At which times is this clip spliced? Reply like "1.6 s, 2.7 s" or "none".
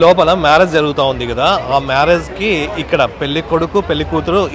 none